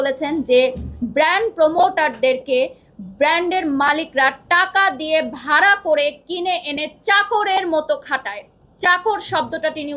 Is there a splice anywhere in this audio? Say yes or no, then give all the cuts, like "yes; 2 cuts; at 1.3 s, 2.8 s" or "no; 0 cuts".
no; 0 cuts